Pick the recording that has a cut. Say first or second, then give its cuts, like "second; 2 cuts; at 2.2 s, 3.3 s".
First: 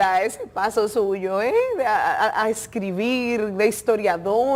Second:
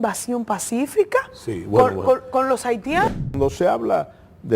second; 1 cut; at 3.1 s